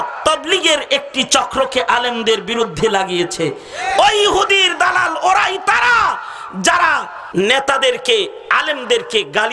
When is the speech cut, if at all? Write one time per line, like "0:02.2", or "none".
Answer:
0:07.2